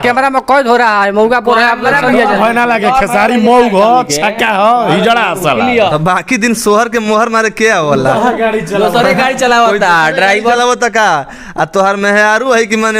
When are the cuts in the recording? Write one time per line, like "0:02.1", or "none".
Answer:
0:05.9